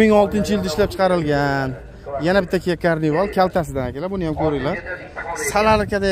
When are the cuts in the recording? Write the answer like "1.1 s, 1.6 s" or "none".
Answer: none